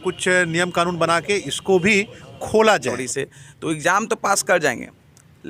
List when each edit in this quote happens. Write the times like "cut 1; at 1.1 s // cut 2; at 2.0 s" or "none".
cut 1; at 3.0 s